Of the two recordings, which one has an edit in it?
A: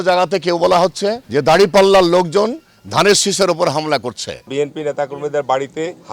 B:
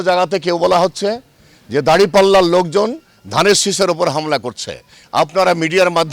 A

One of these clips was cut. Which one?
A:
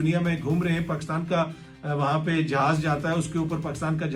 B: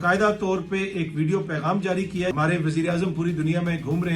B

